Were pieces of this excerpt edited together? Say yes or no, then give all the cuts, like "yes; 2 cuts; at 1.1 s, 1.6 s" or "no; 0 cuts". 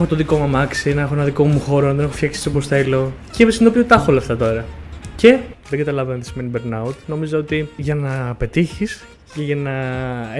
yes; 3 cuts; at 3.2 s, 5.6 s, 7.8 s